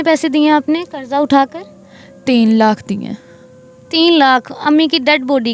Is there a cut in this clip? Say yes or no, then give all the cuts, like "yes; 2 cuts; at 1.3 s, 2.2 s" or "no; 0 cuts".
no; 0 cuts